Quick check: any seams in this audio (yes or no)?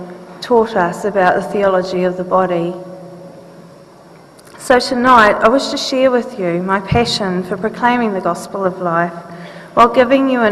yes